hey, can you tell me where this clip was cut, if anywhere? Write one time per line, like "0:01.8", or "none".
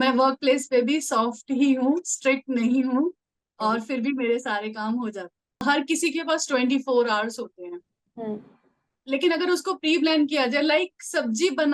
0:05.6